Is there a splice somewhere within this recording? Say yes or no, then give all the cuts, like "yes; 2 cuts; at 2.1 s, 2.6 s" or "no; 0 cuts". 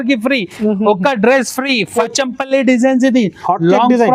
yes; 1 cut; at 2.0 s